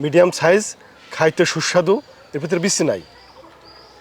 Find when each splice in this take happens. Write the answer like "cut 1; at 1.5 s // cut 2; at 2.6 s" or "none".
none